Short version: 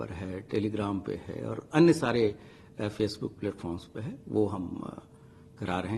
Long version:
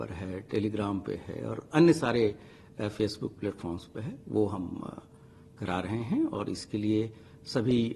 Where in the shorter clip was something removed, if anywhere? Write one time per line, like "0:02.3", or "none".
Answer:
none